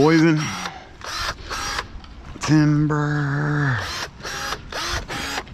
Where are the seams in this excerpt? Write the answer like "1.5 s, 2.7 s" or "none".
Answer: 2.2 s